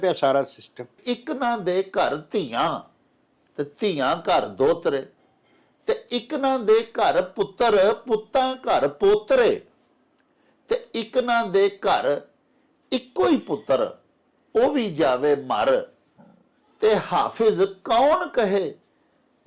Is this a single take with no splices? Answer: no; 1 cut; at 1.0 s

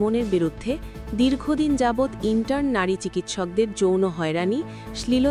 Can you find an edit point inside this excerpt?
no; 0 cuts

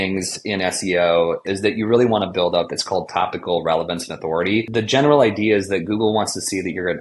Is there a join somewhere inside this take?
yes; 2 cuts; at 1.4 s, 4.7 s

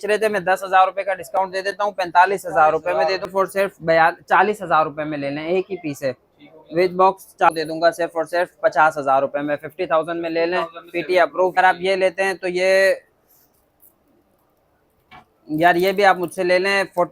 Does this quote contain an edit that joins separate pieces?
yes; 3 cuts; at 3.3 s, 7.5 s, 11.6 s

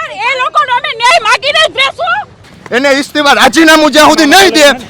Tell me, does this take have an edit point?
yes; 1 cut; at 2.5 s

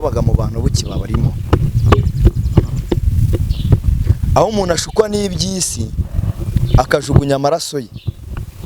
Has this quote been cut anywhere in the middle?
no; 0 cuts

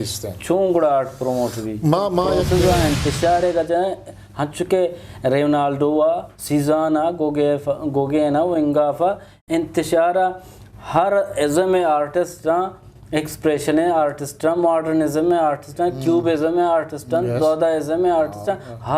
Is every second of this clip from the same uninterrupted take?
no; 1 cut; at 2.4 s

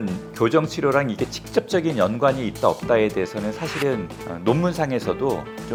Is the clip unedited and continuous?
yes; 0 cuts

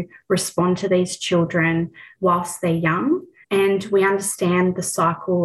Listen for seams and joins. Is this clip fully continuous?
no; 1 cut; at 2.0 s

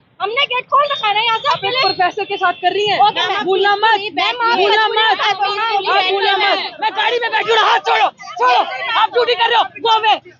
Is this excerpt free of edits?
no; 1 cut; at 6.7 s

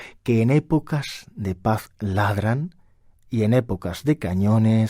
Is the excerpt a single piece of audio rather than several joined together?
yes; 0 cuts

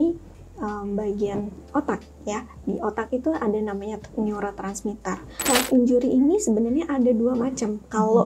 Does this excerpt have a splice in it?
yes; 1 cut; at 5.4 s

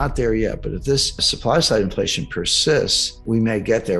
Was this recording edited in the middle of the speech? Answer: yes; 2 cuts; at 1.3 s, 3.1 s

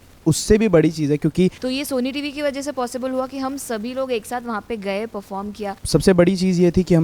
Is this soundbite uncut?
no; 2 cuts; at 1.6 s, 5.7 s

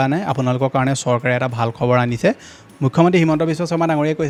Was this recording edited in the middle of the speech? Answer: no; 0 cuts

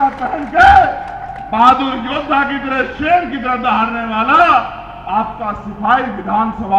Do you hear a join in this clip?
no; 0 cuts

